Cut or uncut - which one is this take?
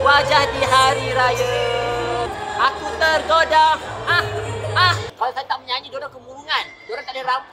cut